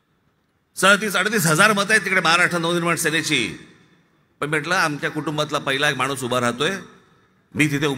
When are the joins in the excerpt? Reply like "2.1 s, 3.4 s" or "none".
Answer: none